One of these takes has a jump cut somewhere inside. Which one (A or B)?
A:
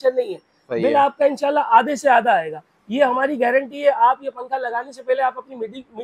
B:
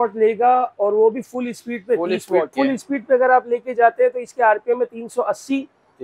B